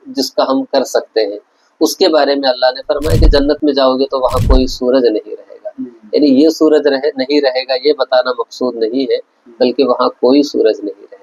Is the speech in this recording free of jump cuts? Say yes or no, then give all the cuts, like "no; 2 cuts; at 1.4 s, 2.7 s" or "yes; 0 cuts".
yes; 0 cuts